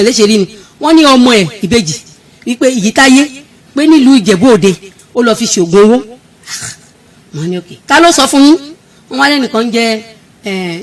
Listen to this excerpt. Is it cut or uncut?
uncut